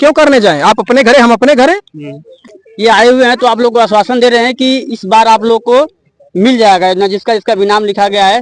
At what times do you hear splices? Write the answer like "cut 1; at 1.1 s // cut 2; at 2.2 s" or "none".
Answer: cut 1; at 2.6 s